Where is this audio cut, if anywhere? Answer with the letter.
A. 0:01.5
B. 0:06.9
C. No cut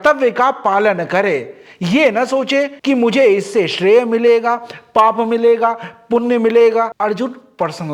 C